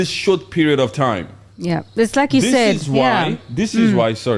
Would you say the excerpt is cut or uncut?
uncut